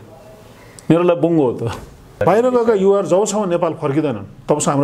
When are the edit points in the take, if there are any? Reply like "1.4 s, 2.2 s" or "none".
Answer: 2.2 s